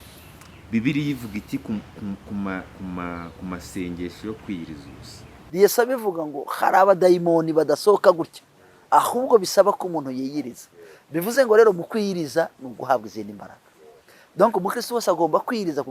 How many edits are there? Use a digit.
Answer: 1